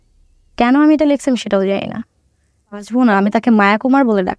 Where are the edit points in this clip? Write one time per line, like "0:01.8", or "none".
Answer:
0:02.9